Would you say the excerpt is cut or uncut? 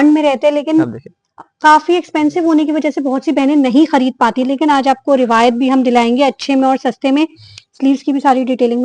uncut